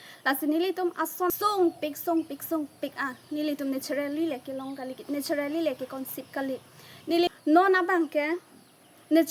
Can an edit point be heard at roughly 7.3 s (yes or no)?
yes